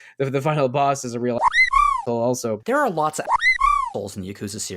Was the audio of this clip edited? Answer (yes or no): yes